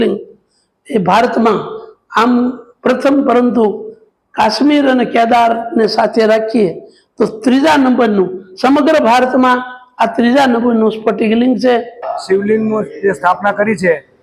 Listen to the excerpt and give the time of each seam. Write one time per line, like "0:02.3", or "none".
0:12.1